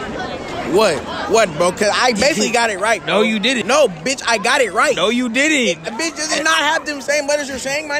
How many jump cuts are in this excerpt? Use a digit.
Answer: 1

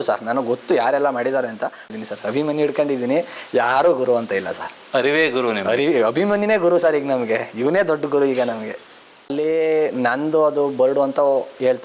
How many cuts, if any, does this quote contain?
2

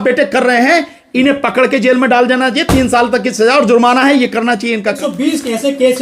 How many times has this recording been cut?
1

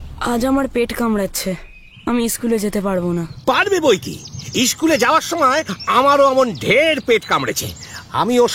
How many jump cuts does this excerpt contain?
0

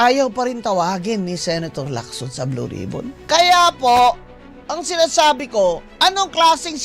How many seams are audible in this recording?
1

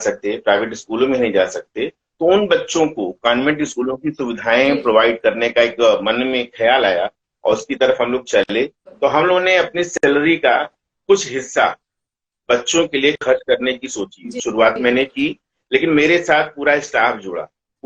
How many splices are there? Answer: 1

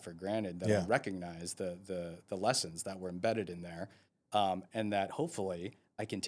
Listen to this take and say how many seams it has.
0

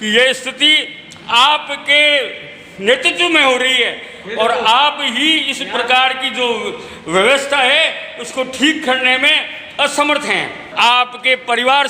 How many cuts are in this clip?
1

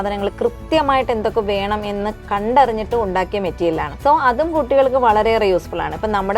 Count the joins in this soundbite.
2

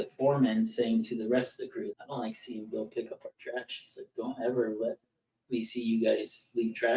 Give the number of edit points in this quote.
1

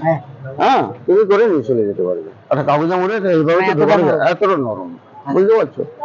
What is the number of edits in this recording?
0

